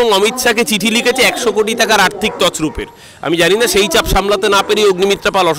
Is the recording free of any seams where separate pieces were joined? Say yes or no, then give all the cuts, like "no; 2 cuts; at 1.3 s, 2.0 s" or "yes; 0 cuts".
yes; 0 cuts